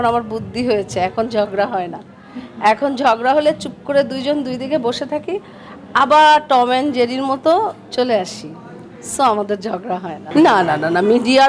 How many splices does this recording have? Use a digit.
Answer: 0